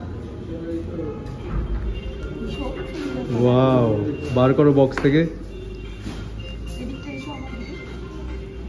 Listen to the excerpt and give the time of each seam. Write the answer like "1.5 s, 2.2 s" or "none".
none